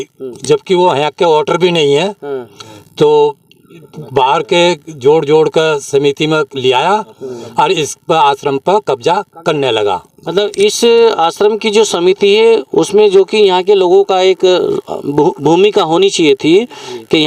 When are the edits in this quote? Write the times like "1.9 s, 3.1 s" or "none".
none